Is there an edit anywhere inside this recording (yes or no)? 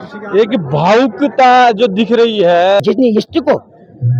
yes